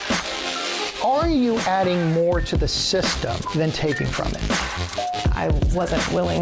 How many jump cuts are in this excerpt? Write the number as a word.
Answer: zero